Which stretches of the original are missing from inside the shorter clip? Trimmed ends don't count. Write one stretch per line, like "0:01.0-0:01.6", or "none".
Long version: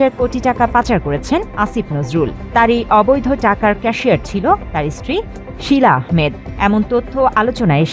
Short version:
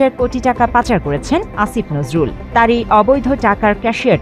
none